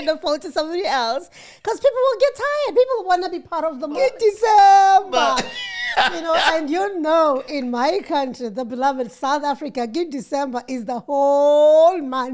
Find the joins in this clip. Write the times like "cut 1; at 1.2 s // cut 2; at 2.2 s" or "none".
cut 1; at 4.0 s